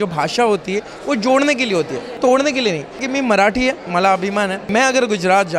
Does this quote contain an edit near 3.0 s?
yes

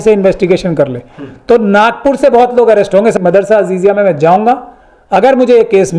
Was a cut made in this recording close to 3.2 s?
yes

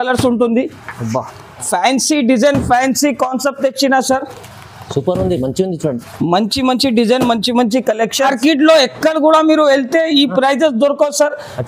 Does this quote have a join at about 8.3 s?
yes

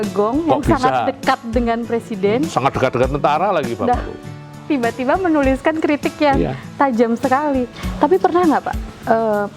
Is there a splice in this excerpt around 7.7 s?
yes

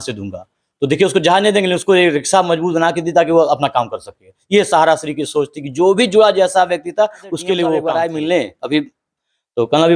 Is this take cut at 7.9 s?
yes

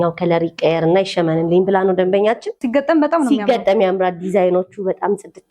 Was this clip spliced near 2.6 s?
yes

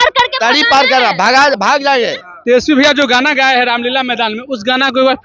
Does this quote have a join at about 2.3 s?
yes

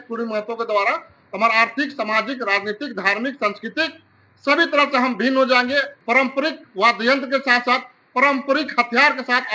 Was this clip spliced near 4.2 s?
no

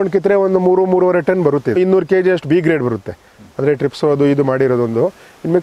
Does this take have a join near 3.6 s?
no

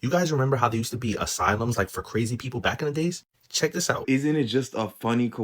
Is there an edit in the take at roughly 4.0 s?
yes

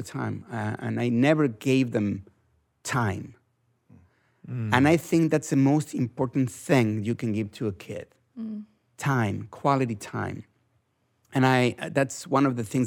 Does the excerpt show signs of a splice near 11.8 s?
no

